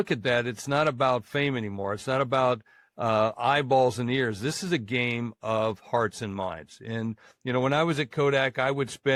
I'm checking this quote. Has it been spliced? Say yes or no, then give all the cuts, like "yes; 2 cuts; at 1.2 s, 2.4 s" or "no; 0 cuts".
no; 0 cuts